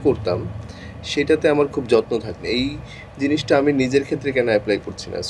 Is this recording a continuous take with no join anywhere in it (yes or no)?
no